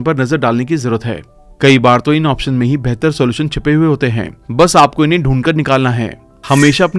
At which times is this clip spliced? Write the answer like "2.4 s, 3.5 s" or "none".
none